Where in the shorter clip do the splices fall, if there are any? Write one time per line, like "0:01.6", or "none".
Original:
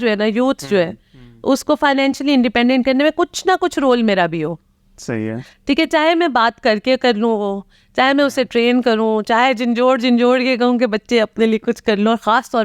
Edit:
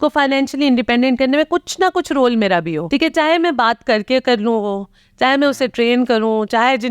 0:02.8